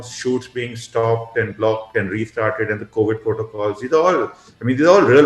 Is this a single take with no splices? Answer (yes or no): yes